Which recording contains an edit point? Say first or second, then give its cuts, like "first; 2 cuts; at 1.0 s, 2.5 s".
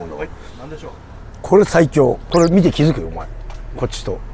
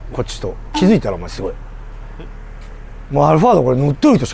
first; 1 cut; at 2.2 s